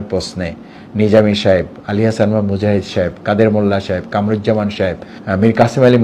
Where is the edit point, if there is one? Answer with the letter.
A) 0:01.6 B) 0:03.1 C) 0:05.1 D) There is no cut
C